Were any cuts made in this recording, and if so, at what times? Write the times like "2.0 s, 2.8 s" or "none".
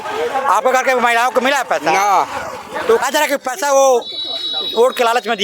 3.0 s